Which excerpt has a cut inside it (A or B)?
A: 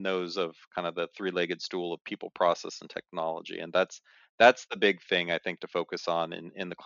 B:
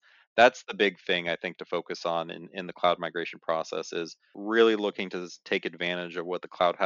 B